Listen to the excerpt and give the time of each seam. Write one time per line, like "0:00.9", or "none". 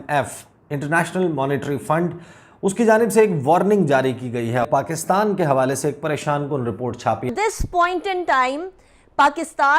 0:04.7
0:07.3